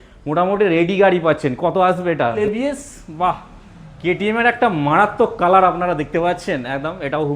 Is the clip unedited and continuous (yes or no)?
no